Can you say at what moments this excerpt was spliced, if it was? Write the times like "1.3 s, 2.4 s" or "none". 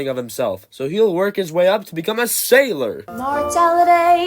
3.1 s